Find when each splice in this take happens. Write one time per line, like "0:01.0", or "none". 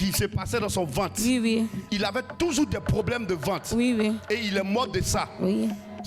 0:01.8